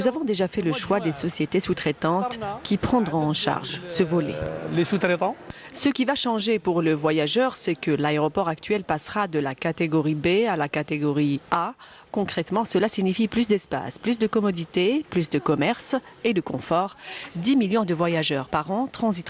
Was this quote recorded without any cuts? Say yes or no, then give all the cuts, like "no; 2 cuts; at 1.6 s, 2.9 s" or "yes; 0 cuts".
yes; 0 cuts